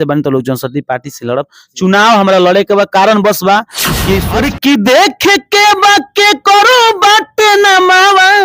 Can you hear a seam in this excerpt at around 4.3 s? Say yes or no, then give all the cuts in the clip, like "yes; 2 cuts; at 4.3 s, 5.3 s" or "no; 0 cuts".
yes; 1 cut; at 4.3 s